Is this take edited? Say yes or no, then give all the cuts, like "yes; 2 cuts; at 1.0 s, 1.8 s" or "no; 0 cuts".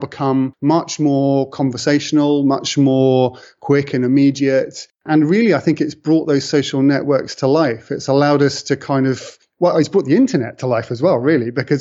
no; 0 cuts